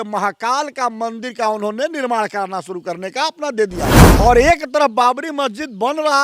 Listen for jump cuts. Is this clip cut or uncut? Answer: cut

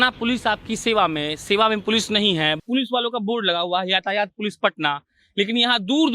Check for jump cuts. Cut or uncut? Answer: cut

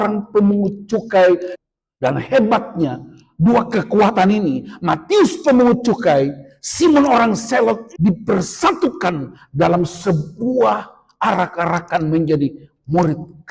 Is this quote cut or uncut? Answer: cut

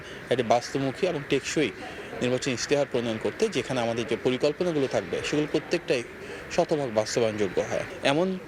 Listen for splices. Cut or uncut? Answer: uncut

